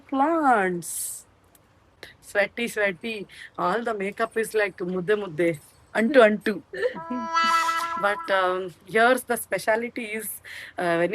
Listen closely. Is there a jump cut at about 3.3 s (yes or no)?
no